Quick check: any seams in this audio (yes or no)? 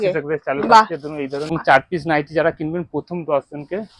yes